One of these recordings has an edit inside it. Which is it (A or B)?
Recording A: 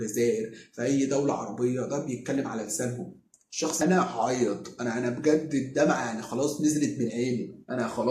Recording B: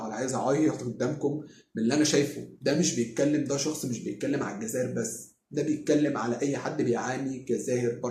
A